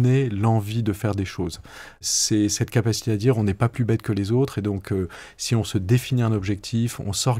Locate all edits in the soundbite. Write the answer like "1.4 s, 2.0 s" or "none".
2.0 s